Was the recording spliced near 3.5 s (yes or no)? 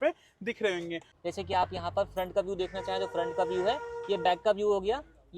no